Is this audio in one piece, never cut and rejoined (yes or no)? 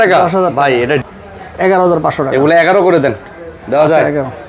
no